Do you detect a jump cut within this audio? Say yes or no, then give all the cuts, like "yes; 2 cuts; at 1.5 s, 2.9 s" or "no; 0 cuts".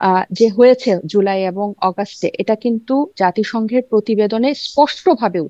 no; 0 cuts